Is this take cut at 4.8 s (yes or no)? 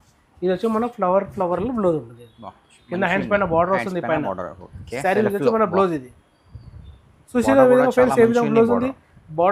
yes